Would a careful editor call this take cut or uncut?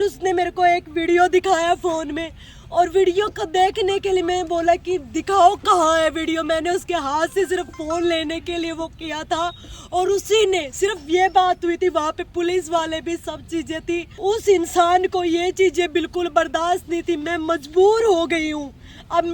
cut